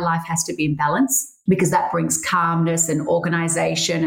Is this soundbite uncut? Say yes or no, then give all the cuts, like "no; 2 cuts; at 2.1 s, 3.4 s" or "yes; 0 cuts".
no; 1 cut; at 1.3 s